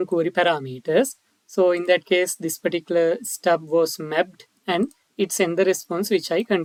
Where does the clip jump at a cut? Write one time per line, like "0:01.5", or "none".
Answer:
none